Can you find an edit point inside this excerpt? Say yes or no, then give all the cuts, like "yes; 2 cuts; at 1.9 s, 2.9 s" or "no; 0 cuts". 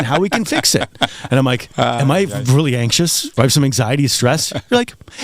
yes; 2 cuts; at 1.7 s, 3.3 s